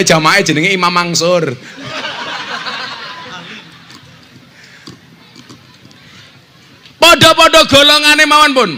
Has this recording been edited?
no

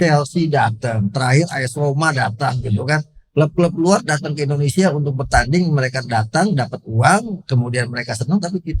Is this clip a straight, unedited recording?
yes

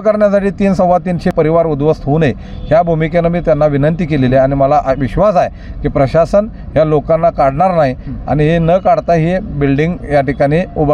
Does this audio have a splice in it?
yes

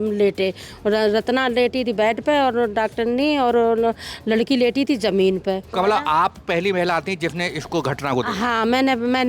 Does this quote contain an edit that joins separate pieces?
yes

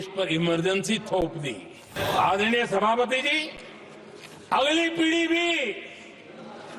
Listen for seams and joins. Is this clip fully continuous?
no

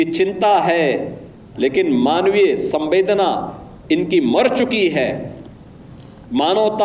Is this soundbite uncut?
yes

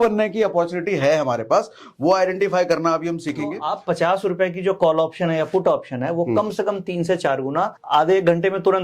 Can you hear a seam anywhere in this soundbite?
yes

